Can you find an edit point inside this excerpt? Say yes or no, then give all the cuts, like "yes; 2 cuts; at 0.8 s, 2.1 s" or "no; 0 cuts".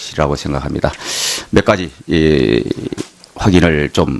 yes; 1 cut; at 2.9 s